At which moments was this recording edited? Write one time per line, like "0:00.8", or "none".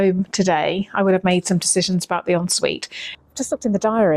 0:03.0